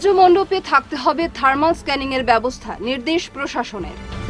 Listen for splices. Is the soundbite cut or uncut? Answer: uncut